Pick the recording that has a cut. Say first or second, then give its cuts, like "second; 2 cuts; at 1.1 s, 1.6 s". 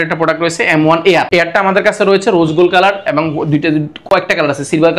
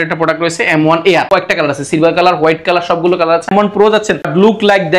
second; 2 cuts; at 1.3 s, 3.5 s